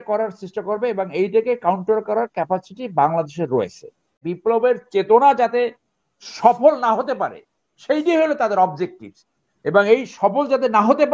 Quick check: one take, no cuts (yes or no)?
no